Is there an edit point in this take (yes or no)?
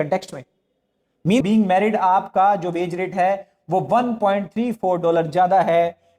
yes